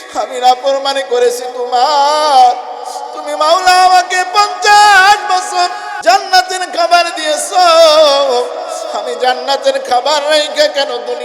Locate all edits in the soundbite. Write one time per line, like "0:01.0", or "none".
0:05.9